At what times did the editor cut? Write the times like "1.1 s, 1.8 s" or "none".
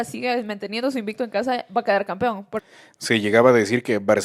2.6 s